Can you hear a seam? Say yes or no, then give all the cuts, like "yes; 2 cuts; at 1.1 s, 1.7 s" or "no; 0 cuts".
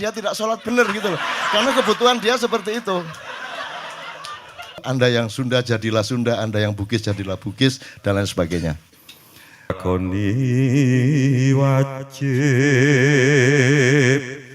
yes; 2 cuts; at 4.8 s, 9.7 s